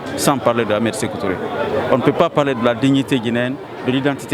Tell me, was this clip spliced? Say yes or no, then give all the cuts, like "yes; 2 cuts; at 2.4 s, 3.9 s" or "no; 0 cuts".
no; 0 cuts